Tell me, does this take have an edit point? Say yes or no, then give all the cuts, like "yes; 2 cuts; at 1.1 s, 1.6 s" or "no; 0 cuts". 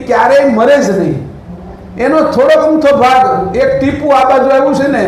no; 0 cuts